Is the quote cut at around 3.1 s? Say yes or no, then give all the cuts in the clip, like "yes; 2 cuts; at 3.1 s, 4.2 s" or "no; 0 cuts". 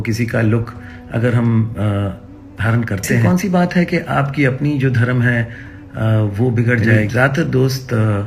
yes; 2 cuts; at 3.1 s, 7.0 s